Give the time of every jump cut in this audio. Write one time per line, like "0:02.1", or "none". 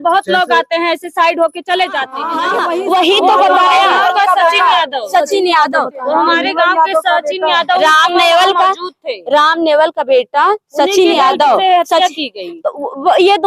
0:02.3